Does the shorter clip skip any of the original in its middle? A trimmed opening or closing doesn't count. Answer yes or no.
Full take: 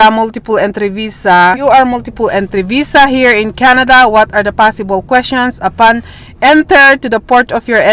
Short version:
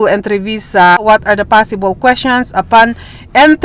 yes